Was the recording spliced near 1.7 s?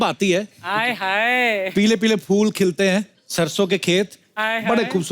yes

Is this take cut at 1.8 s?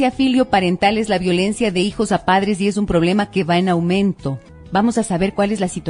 yes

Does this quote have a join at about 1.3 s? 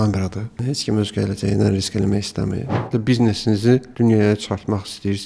no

